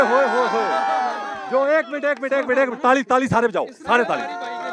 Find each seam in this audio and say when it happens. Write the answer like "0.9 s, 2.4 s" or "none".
none